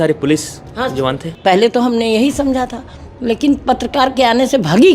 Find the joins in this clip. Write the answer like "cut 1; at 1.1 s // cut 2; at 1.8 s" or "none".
cut 1; at 1.3 s